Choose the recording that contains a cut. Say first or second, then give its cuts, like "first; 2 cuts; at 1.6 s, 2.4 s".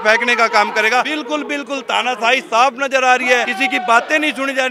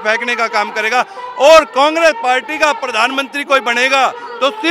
first; 2 cuts; at 1.1 s, 3.5 s